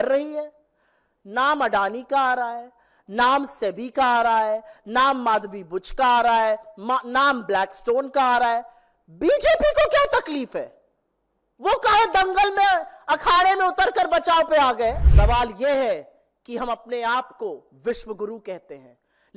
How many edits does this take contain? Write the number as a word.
one